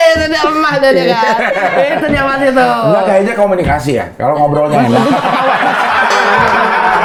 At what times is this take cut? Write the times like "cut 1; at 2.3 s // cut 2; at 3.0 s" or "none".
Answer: none